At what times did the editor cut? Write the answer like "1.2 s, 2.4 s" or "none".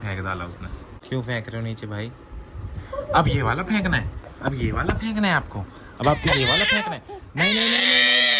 0.9 s